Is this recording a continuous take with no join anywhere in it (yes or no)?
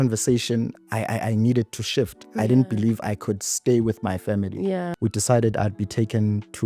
no